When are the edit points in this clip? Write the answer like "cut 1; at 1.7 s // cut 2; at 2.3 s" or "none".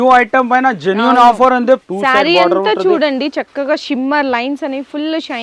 cut 1; at 1.9 s